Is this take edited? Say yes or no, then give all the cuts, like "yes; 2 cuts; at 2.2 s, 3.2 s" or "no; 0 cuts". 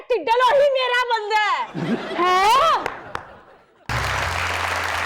yes; 1 cut; at 3.9 s